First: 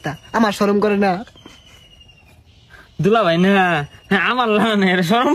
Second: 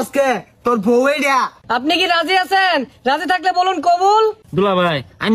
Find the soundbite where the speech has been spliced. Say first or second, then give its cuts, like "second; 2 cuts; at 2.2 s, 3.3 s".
second; 2 cuts; at 1.6 s, 4.4 s